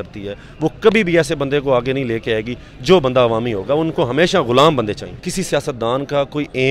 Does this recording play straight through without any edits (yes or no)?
no